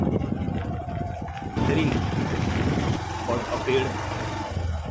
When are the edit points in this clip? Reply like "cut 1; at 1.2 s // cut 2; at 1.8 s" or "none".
cut 1; at 1.6 s // cut 2; at 2.9 s